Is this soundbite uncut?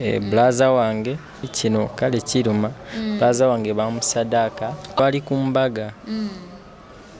no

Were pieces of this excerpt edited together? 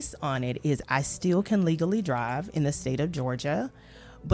no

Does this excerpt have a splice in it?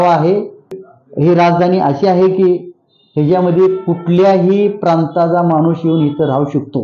yes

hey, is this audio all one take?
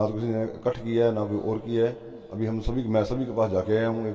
yes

